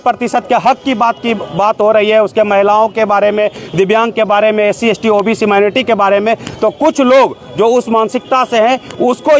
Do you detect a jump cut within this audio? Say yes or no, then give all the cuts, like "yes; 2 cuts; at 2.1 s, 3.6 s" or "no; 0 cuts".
no; 0 cuts